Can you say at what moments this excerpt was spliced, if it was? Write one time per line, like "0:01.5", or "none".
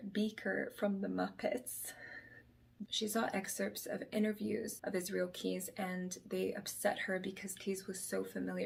none